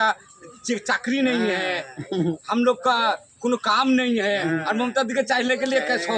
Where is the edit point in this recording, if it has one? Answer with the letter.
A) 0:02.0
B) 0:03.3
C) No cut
C